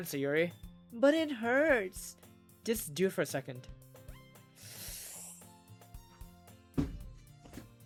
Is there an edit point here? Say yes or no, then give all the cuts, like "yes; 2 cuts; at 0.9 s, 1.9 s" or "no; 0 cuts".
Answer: no; 0 cuts